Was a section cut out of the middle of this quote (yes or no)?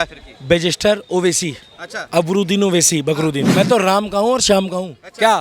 yes